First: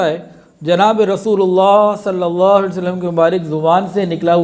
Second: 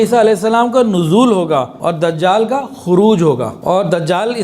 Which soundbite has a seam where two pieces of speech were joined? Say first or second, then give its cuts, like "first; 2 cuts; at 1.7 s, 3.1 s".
second; 2 cuts; at 1.7 s, 3.6 s